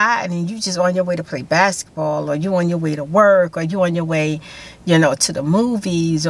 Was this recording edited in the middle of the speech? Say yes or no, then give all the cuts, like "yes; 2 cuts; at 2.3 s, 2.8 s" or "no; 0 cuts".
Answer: no; 0 cuts